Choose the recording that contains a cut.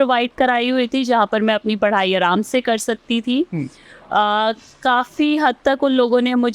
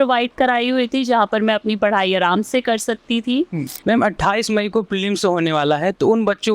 second; 1 cut; at 3.7 s

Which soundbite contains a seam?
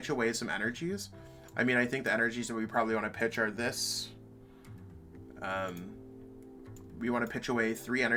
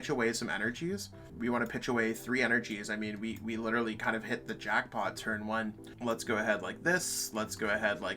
second; 2 cuts; at 1.2 s, 5.9 s

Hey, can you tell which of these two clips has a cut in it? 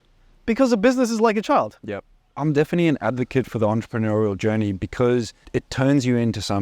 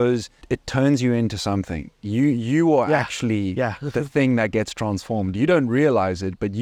first; 1 cut; at 2.4 s

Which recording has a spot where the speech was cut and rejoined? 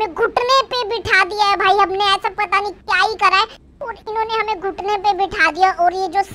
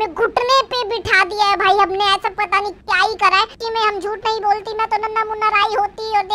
second; 1 cut; at 3.6 s

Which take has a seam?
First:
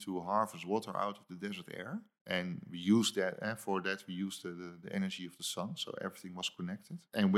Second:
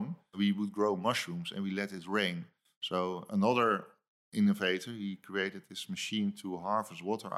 first; 1 cut; at 2.1 s

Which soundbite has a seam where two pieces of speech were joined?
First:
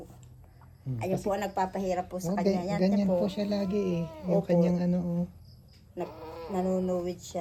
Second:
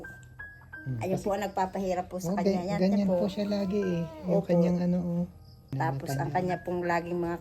second; 1 cut; at 5.7 s

